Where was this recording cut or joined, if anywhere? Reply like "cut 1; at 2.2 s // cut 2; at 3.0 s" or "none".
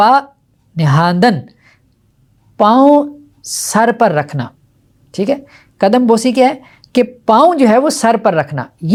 none